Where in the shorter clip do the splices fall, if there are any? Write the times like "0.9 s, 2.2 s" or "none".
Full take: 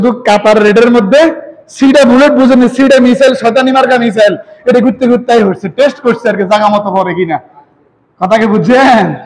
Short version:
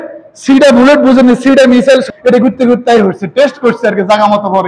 2.0 s